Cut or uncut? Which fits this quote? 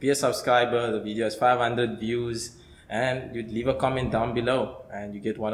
uncut